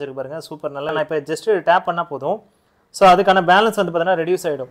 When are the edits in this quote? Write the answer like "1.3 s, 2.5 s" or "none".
0.9 s